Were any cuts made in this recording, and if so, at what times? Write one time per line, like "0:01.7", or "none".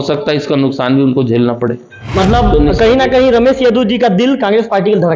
0:02.0